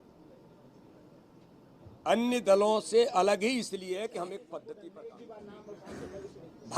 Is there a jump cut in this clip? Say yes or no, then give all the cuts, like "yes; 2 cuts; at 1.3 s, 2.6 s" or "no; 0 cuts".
yes; 1 cut; at 4.8 s